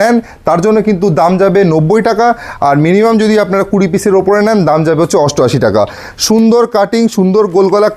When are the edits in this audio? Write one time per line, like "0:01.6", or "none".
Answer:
none